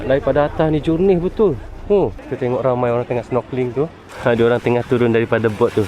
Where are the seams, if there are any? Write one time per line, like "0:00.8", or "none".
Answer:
0:02.2
0:04.0